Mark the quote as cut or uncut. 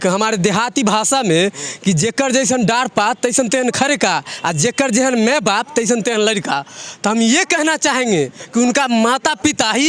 uncut